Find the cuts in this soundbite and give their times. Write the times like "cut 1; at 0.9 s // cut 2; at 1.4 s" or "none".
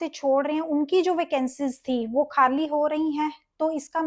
none